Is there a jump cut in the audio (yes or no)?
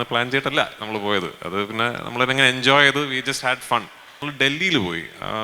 yes